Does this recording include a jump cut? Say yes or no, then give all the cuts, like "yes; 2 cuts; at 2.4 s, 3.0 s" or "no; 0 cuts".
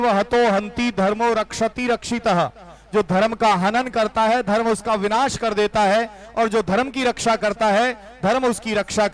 no; 0 cuts